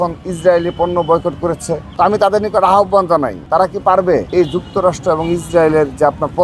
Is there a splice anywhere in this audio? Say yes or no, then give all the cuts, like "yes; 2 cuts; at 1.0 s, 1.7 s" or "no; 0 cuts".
yes; 3 cuts; at 1.8 s, 3.4 s, 4.3 s